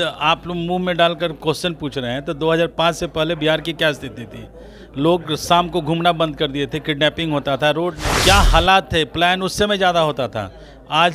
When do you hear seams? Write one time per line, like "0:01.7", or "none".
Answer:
0:08.0